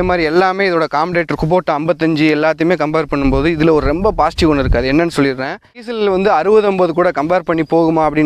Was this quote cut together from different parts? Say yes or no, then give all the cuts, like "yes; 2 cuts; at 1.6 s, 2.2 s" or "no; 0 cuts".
yes; 1 cut; at 5.9 s